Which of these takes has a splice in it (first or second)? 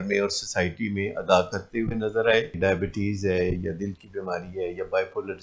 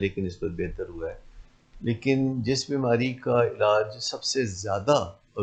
first